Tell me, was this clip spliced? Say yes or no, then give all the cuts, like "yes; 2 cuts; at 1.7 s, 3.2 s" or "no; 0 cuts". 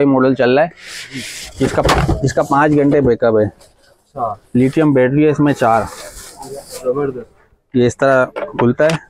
no; 0 cuts